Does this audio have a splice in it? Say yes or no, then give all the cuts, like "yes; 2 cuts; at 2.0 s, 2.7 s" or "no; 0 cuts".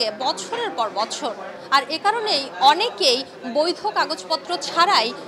no; 0 cuts